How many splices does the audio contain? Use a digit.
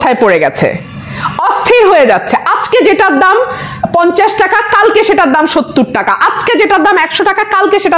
0